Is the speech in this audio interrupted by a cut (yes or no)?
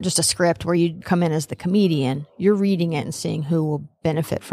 yes